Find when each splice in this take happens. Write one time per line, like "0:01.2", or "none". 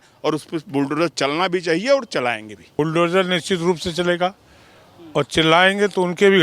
0:02.6